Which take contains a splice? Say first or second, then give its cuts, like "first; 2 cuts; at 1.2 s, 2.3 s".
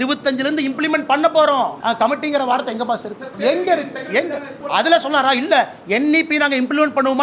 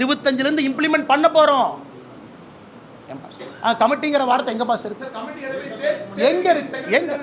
first; 3 cuts; at 1.8 s, 3.3 s, 4.5 s